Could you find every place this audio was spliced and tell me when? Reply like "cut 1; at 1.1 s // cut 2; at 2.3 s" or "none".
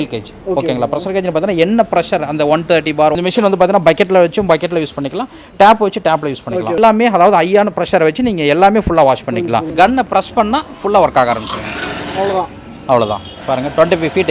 cut 1; at 3.1 s // cut 2; at 6.8 s // cut 3; at 9.7 s

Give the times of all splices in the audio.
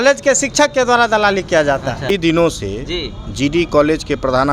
cut 1; at 2.1 s

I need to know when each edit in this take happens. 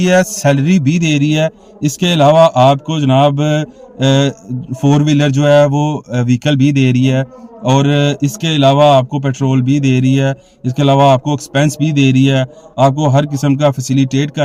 none

